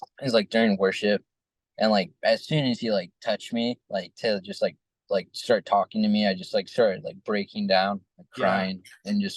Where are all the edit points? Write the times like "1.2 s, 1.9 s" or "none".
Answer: none